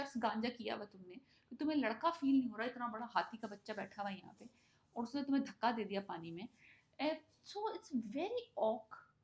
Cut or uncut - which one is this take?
uncut